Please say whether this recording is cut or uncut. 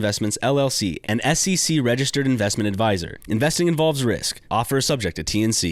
uncut